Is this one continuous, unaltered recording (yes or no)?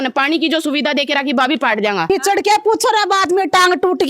no